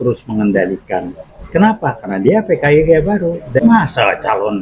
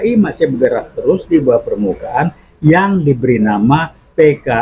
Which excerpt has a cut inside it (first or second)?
first